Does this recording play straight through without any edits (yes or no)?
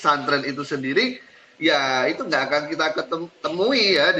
yes